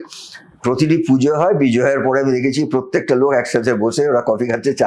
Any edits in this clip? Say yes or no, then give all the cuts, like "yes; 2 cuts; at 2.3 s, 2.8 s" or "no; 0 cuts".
no; 0 cuts